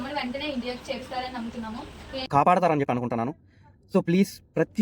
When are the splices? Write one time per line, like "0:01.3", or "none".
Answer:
0:02.3